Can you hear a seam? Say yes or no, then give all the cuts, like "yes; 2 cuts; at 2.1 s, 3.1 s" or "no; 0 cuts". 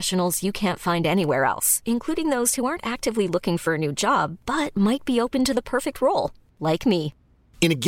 no; 0 cuts